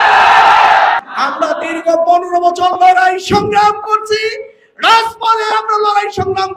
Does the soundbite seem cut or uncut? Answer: cut